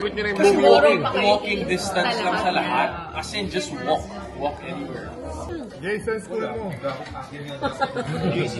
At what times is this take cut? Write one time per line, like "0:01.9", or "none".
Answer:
none